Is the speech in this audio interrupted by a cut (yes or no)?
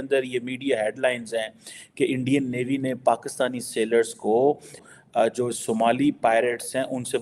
yes